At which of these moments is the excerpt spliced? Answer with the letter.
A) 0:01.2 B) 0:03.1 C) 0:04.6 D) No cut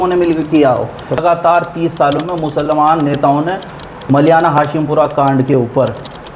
A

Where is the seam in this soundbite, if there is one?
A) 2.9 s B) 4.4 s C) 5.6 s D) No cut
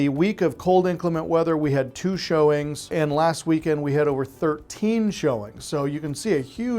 A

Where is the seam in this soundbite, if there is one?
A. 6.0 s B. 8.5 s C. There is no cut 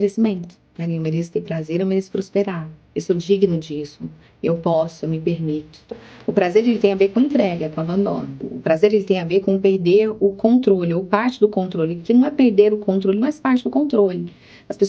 B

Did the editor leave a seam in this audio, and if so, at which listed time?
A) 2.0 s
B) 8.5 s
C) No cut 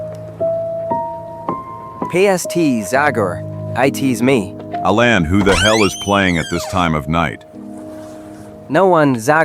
B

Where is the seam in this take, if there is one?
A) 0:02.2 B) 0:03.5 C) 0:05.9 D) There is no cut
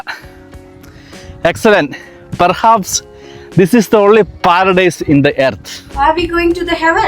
C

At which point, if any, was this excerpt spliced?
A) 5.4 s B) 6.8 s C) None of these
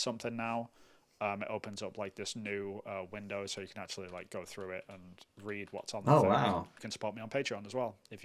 B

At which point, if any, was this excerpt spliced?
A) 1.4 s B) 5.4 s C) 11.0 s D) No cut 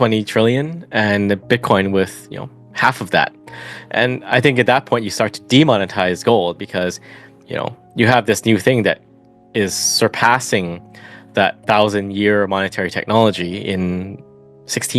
D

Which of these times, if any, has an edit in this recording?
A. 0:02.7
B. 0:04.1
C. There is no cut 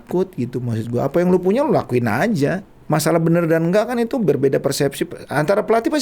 A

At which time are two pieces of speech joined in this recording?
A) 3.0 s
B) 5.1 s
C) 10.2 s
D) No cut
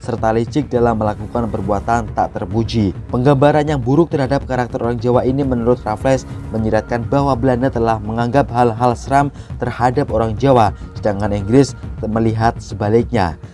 A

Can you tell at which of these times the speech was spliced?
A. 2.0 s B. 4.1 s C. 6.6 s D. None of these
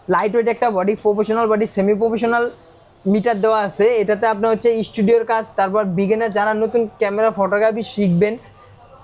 D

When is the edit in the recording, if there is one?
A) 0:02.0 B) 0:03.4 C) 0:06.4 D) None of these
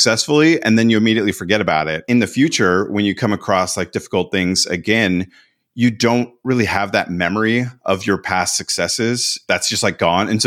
A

